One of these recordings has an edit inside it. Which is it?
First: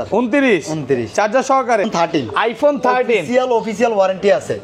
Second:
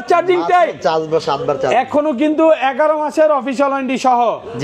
first; 1 cut; at 1.9 s

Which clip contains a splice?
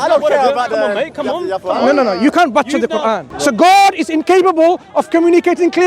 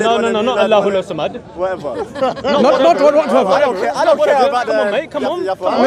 first; 1 cut; at 3.3 s

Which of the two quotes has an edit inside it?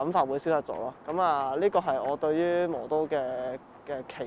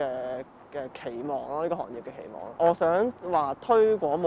second; 1 cut; at 2.4 s

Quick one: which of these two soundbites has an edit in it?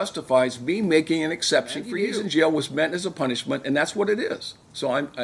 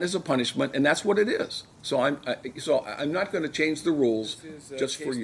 first; 1 cut; at 2.0 s

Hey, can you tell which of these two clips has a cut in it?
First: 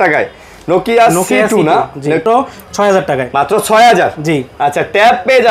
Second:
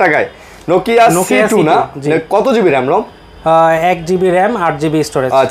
first; 1 cut; at 2.2 s

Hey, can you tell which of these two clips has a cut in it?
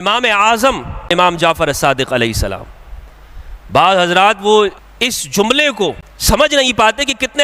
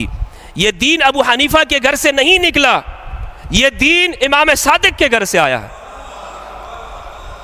first; 3 cuts; at 1.1 s, 4.9 s, 6.1 s

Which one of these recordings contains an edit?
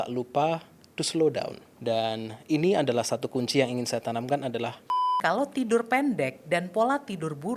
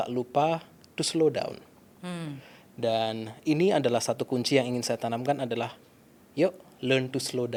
first; 2 cuts; at 1.6 s, 5.1 s

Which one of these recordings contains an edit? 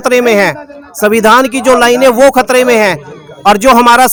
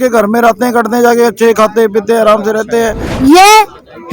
second; 1 cut; at 3.0 s

